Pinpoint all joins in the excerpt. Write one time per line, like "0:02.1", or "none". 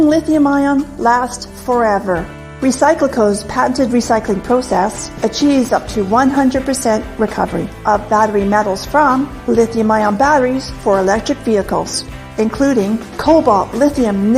0:01.3